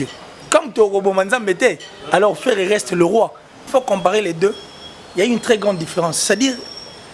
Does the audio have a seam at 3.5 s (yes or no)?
yes